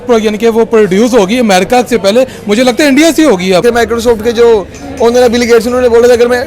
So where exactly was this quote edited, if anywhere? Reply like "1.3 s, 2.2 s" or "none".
3.6 s